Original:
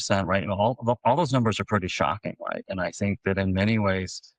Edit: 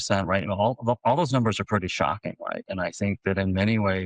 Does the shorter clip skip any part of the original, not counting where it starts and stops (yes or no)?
no